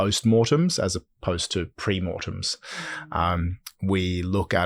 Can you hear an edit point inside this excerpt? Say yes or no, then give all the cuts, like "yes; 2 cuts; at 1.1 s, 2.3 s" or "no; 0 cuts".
no; 0 cuts